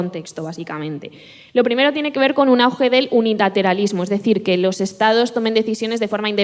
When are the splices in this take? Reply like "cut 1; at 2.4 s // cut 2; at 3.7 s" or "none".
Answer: none